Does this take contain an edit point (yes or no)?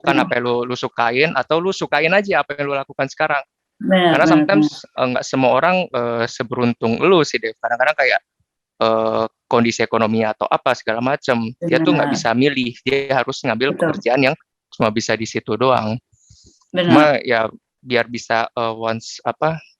no